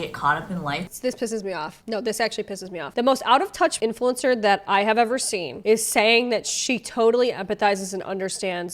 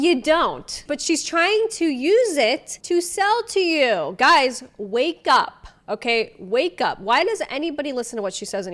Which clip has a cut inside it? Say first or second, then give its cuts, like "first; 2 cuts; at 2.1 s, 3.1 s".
first; 1 cut; at 0.9 s